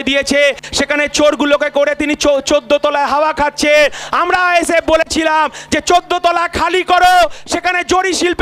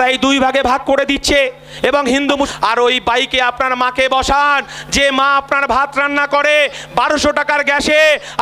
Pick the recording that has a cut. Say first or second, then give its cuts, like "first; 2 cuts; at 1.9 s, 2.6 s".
second; 1 cut; at 2.5 s